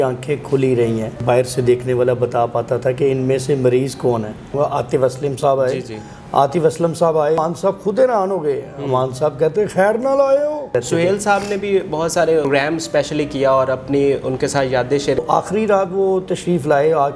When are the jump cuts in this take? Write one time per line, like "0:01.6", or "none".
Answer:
0:01.2
0:04.6
0:07.4
0:10.7
0:12.5
0:15.2

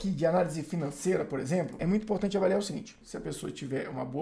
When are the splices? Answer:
0:01.8
0:03.0

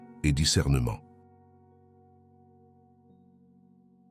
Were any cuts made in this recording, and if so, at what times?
0:01.1

